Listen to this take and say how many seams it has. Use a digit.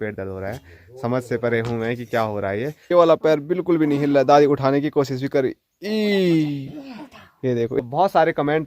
2